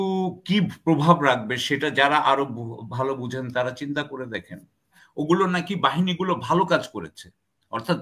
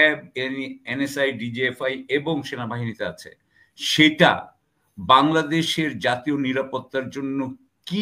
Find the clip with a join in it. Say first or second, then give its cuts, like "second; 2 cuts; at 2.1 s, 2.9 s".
first; 1 cut; at 5.0 s